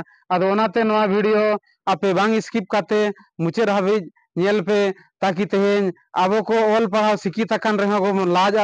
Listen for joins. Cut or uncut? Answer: uncut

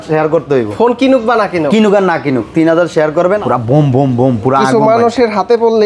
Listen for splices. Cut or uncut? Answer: cut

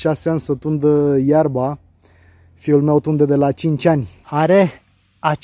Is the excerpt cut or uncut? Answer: cut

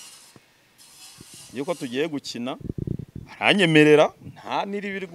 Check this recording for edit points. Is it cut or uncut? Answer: uncut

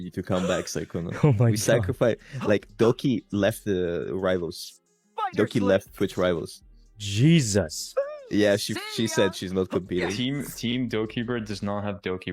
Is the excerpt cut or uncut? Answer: uncut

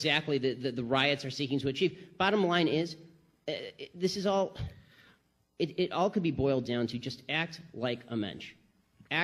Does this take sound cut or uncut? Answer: uncut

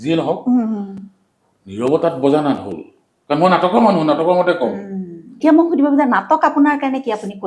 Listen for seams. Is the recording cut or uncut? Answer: cut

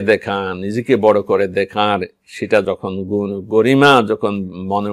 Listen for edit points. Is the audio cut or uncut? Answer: cut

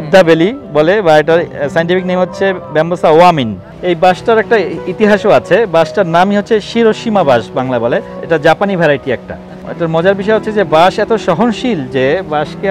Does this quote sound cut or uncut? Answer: cut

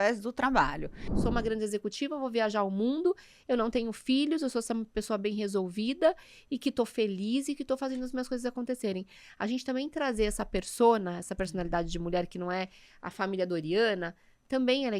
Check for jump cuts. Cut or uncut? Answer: cut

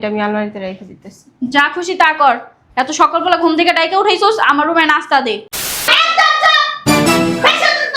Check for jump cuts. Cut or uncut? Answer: cut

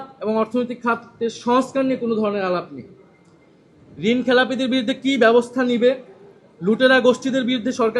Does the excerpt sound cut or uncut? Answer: uncut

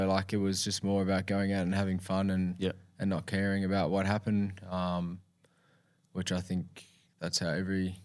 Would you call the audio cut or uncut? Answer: uncut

